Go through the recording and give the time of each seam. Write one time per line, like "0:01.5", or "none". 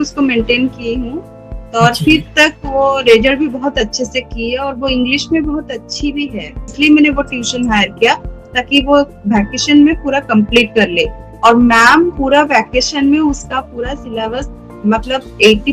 0:06.7